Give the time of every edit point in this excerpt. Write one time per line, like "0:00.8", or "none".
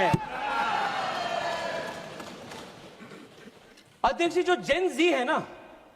none